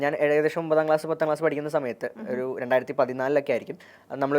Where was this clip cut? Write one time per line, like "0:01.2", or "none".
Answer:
none